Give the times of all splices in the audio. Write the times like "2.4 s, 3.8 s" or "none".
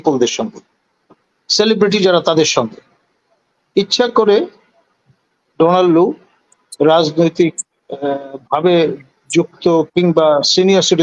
none